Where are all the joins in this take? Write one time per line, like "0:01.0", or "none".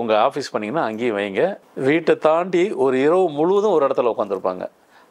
0:01.7